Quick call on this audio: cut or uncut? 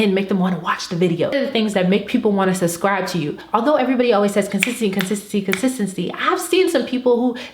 cut